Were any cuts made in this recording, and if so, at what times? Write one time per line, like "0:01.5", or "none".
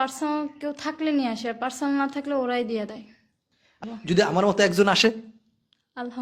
0:03.8